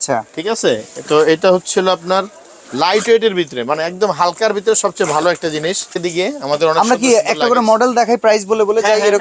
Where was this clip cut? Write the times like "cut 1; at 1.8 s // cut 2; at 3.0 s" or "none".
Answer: cut 1; at 6.0 s